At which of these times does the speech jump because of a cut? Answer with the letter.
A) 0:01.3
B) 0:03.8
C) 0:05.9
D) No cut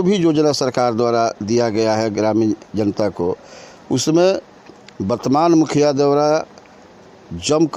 D